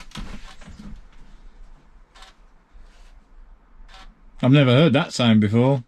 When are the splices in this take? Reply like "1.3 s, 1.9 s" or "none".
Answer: none

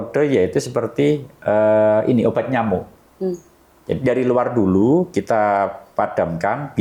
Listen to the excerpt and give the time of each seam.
none

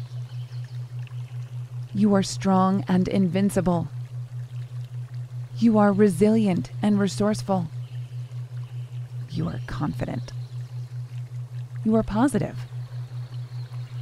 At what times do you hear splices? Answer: none

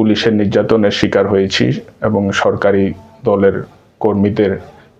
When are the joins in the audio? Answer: none

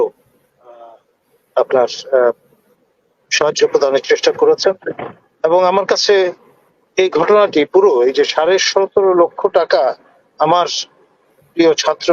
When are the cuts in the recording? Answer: none

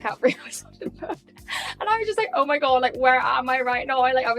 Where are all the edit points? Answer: none

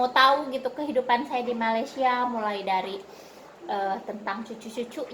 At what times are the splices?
none

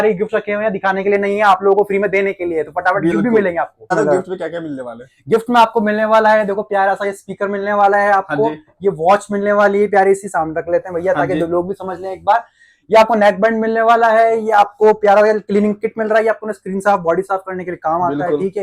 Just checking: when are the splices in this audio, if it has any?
3.9 s

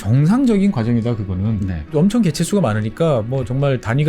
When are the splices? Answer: 1.9 s

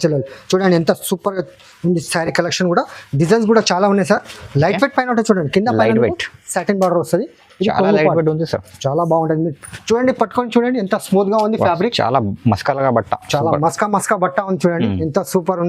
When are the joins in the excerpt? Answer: none

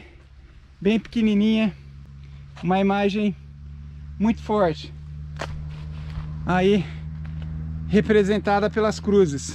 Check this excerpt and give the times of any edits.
none

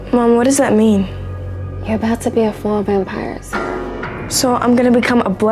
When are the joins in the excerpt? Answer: none

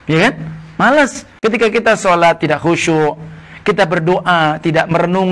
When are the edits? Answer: 1.2 s

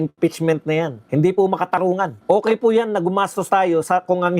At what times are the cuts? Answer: 1.0 s, 2.1 s

